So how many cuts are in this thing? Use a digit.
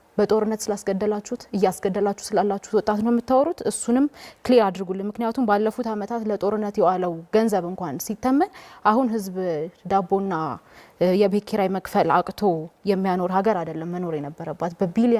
0